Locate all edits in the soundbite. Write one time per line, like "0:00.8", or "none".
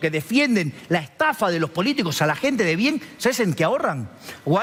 none